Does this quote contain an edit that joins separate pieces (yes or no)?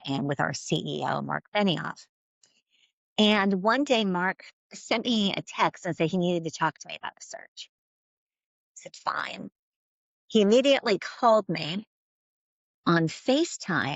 no